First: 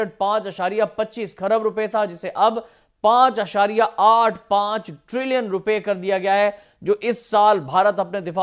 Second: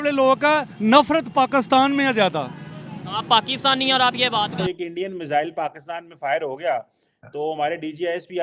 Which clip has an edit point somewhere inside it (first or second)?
second